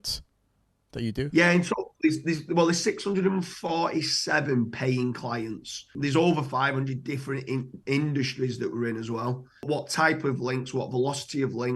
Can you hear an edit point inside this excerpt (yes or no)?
yes